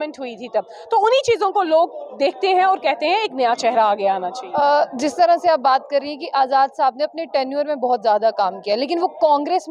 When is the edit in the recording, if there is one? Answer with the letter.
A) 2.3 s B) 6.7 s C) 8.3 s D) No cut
D